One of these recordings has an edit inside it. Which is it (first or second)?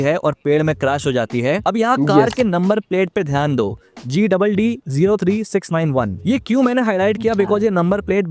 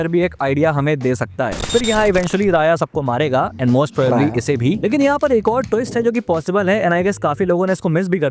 second